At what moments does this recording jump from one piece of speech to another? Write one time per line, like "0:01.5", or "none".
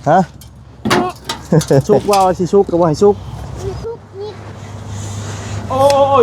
0:01.9